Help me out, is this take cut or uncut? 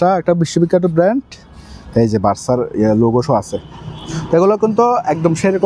uncut